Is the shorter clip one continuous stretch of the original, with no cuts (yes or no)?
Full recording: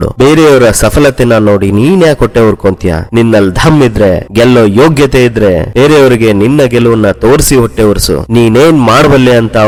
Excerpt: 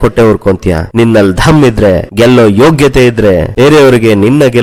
yes